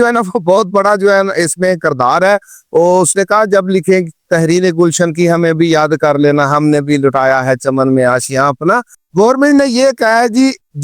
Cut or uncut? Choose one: cut